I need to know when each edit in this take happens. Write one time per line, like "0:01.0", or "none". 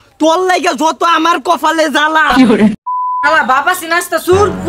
0:03.2